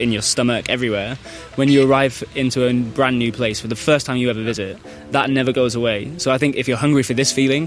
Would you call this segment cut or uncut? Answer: cut